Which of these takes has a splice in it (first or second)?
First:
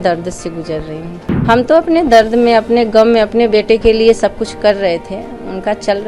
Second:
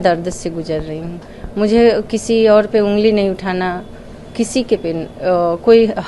first